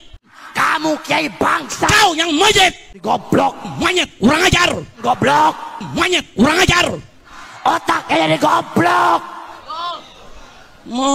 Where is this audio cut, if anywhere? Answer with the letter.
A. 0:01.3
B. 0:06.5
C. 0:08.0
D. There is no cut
D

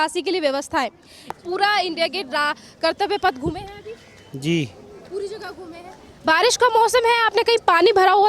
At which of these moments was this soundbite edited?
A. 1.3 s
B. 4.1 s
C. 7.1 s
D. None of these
A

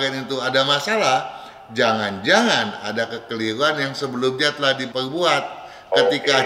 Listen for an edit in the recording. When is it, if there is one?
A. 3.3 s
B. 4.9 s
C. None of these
B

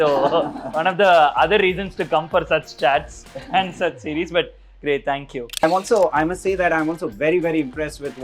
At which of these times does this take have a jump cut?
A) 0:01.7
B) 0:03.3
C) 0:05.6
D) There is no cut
C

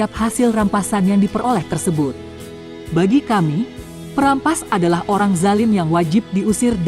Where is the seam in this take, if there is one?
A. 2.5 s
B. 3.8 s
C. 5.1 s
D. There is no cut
A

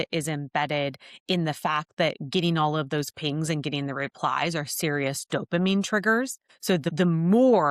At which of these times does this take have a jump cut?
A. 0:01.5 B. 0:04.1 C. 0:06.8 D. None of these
C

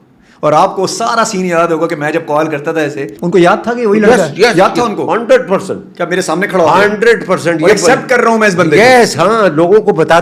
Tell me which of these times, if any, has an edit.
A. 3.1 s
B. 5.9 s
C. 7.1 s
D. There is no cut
A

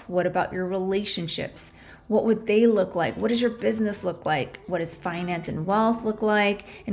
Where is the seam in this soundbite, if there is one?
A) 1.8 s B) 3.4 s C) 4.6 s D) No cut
D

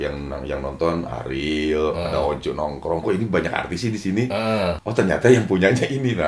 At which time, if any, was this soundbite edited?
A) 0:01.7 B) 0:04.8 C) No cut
B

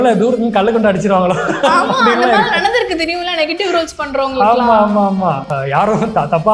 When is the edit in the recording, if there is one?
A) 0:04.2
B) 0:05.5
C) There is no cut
B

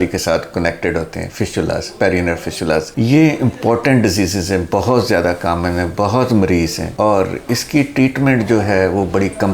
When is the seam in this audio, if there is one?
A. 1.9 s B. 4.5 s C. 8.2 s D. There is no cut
D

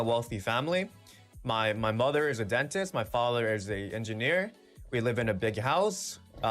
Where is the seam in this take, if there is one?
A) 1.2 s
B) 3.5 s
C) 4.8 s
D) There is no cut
D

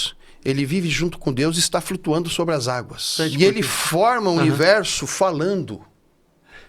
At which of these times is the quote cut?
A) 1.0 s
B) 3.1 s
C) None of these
B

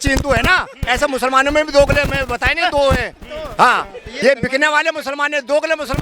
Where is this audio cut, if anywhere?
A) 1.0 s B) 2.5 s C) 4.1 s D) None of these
C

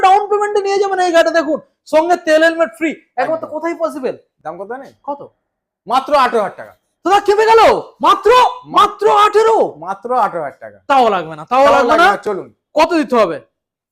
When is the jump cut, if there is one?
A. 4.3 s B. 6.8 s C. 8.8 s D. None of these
A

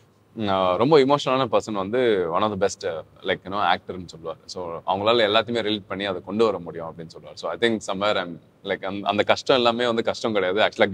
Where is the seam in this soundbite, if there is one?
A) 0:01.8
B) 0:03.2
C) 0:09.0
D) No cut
D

